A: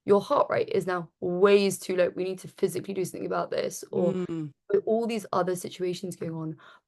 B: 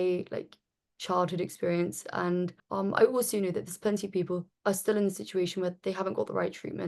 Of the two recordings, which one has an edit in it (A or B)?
B